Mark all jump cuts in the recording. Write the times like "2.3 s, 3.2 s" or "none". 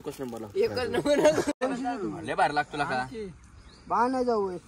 1.6 s